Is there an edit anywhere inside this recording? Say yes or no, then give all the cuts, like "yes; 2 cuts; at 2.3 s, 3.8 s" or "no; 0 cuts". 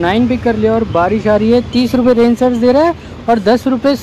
no; 0 cuts